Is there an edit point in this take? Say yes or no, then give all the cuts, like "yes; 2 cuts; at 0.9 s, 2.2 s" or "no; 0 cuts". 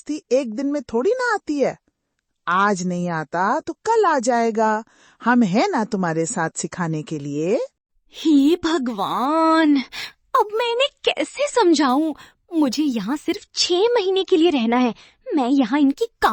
no; 0 cuts